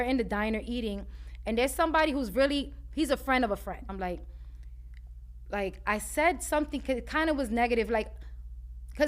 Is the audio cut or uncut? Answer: cut